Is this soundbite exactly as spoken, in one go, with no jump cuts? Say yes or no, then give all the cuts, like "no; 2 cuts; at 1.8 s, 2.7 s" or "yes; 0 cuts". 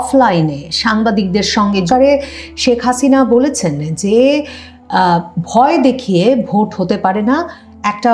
no; 1 cut; at 1.9 s